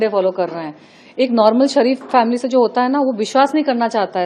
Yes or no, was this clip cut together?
no